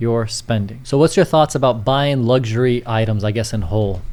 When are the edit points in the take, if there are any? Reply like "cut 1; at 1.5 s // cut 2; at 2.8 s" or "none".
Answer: none